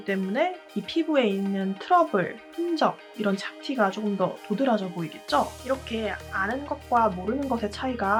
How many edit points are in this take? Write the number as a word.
zero